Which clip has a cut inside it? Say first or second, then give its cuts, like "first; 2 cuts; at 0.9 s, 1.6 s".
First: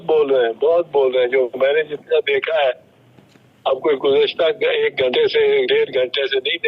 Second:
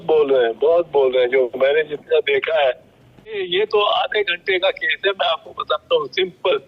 second; 1 cut; at 3.4 s